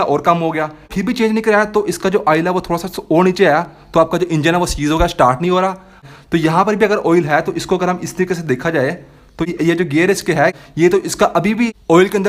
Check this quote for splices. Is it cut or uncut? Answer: cut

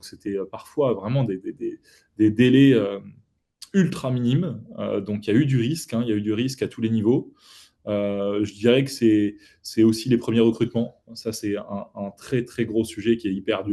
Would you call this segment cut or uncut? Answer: uncut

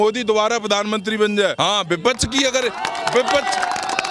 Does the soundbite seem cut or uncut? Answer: cut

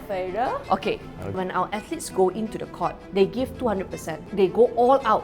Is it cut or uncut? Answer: cut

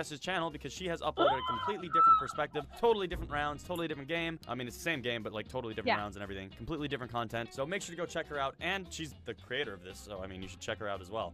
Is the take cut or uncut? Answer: cut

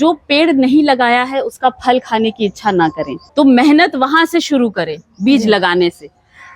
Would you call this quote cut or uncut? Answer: cut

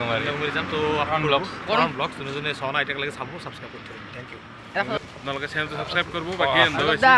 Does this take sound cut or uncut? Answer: cut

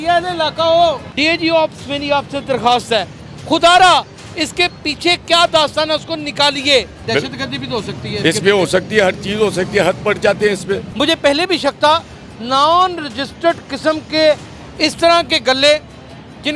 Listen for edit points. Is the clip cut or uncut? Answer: cut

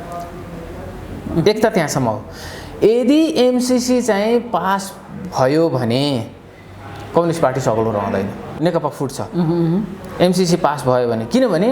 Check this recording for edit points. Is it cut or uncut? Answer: cut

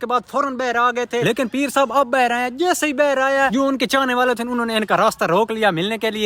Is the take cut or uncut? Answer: uncut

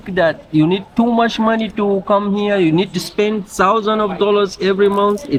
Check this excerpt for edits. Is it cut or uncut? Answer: uncut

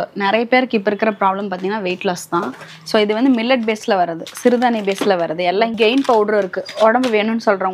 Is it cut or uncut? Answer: cut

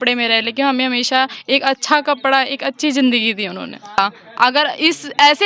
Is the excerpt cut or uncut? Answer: cut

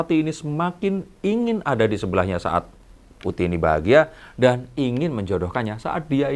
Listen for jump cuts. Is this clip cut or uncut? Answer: uncut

